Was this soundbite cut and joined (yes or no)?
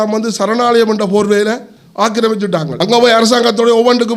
yes